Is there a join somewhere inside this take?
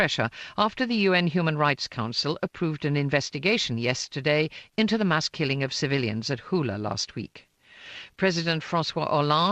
yes; 1 cut; at 3.6 s

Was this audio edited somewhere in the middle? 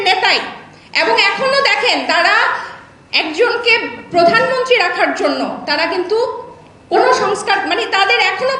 no; 0 cuts

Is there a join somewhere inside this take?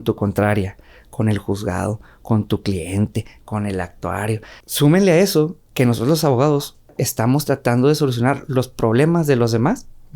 yes; 2 cuts; at 4.6 s, 7.0 s

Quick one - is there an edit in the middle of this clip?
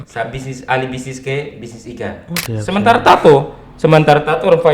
yes; 1 cut; at 2.4 s

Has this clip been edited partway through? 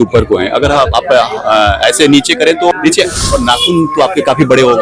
yes; 1 cut; at 2.7 s

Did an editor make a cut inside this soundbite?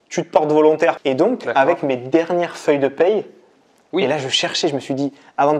yes; 2 cuts; at 1.0 s, 3.5 s

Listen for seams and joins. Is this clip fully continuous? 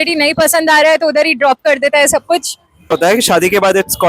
no; 1 cut; at 3.0 s

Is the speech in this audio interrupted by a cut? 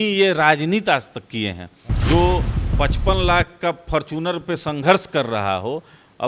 yes; 1 cut; at 1.9 s

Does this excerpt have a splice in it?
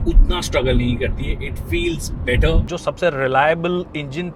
yes; 1 cut; at 2.6 s

